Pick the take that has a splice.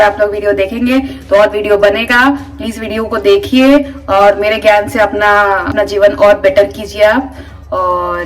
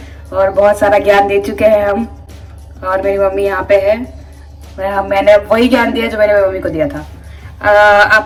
first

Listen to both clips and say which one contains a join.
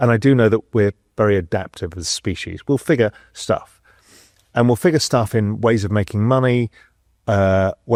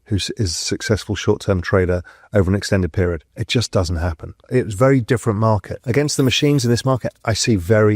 second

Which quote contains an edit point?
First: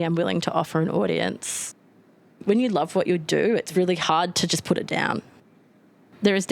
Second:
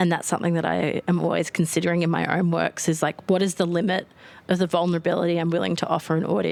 first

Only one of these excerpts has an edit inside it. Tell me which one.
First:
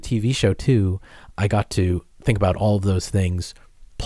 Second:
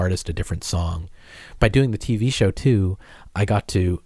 second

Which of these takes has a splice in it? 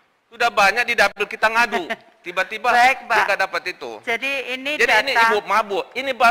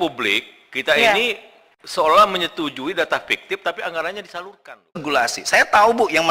second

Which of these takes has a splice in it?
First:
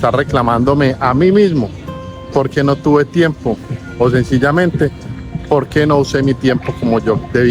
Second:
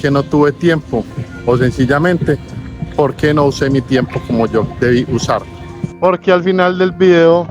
second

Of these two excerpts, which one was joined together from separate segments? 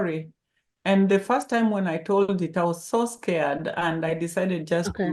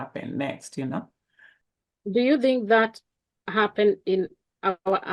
second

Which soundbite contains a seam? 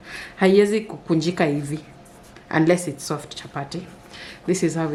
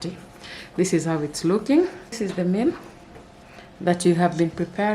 second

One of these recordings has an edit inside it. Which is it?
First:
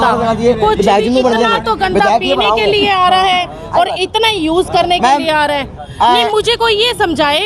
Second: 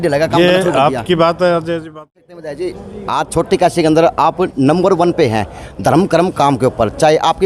second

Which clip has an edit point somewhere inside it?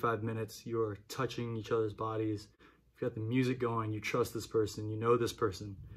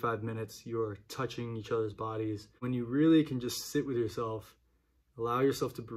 second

